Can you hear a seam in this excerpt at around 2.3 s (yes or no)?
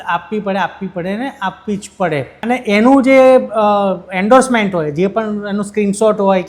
yes